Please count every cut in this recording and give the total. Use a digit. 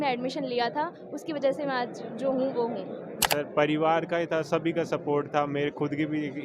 1